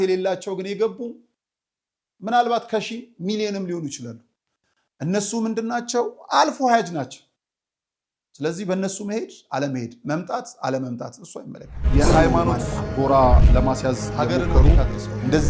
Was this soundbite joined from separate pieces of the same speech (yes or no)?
yes